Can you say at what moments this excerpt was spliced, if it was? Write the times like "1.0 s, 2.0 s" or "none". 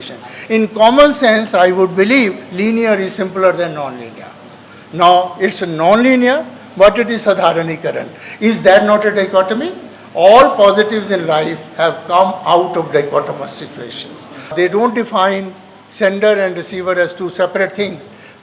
14.5 s